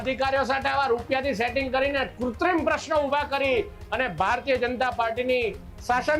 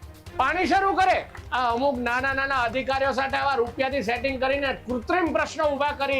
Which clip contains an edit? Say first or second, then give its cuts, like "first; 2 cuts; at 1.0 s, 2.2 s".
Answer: second; 1 cut; at 1.4 s